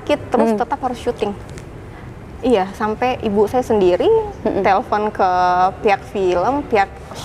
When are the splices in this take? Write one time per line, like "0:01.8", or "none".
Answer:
none